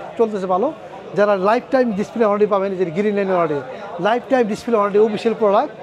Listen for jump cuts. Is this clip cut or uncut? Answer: uncut